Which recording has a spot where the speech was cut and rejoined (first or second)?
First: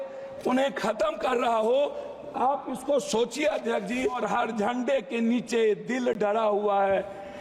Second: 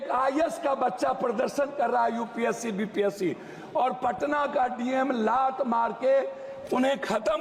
first